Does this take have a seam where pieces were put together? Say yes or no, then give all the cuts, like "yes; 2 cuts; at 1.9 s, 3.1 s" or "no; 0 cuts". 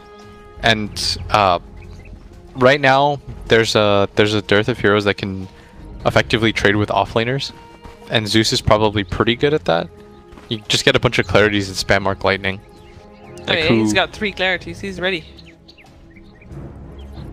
no; 0 cuts